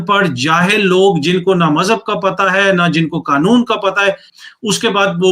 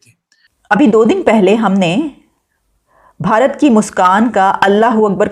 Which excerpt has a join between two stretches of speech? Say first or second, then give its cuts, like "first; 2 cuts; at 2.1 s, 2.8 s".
first; 1 cut; at 4.3 s